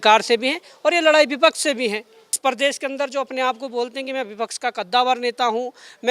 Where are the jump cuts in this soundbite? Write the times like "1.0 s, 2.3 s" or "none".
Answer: 2.4 s